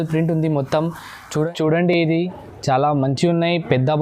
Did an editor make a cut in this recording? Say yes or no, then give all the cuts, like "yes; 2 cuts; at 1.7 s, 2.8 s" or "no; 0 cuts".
yes; 1 cut; at 1.5 s